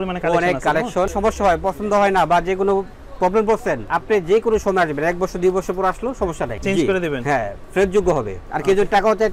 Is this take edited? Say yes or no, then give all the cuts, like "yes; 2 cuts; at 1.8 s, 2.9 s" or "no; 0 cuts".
yes; 4 cuts; at 1.1 s, 3.9 s, 6.5 s, 8.4 s